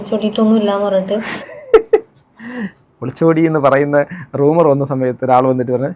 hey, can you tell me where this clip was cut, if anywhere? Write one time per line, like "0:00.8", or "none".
none